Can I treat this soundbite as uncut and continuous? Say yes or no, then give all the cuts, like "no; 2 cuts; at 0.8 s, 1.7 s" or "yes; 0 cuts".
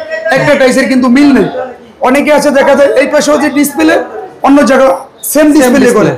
yes; 0 cuts